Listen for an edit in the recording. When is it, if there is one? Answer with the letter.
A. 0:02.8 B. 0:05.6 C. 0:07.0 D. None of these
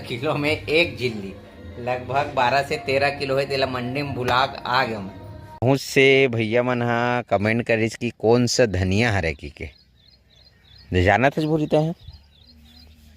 B